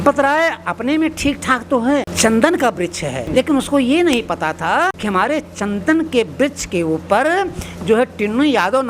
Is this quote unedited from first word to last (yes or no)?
no